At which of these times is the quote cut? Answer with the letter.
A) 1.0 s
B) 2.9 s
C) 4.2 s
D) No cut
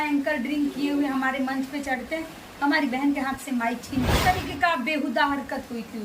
C